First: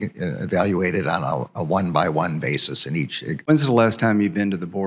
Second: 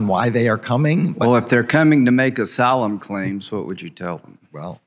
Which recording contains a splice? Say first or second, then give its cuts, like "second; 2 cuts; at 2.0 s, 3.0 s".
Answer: first; 1 cut; at 3.5 s